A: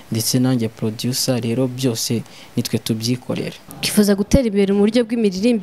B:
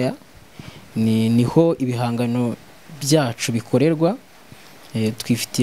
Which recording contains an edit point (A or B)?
A